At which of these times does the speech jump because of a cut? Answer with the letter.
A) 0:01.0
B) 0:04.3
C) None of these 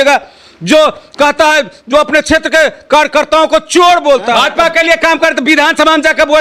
B